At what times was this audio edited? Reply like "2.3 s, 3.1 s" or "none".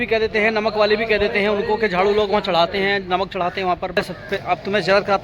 4.0 s